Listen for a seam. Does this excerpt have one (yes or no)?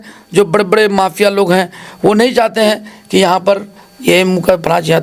no